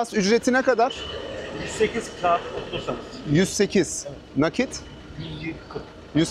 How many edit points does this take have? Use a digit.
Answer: 0